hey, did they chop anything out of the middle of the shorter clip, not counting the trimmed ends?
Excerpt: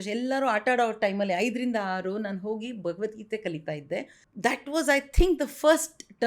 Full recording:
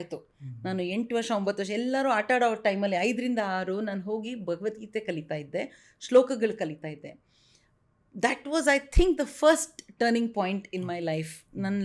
yes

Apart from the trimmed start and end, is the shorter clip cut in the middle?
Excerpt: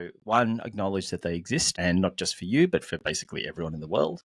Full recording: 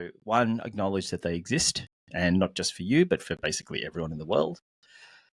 yes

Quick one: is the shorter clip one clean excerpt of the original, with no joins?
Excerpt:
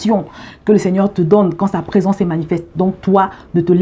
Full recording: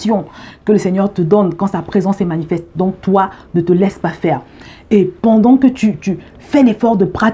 yes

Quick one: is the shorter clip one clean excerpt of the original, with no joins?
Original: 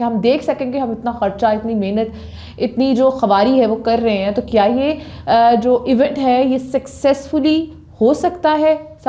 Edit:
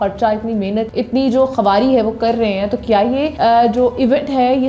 no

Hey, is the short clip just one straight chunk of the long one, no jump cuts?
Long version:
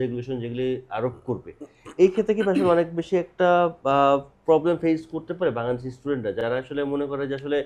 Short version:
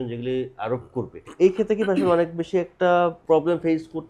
no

